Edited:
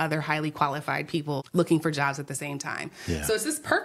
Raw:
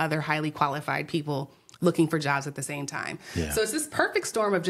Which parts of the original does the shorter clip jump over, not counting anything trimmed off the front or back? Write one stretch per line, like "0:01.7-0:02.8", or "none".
0:01.4-0:01.7